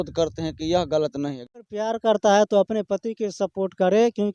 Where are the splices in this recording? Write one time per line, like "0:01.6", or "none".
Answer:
0:01.4